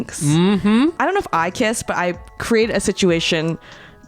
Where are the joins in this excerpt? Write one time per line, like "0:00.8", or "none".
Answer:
0:01.0